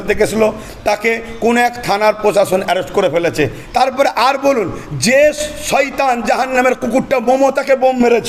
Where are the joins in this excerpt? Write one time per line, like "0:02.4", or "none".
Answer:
0:03.6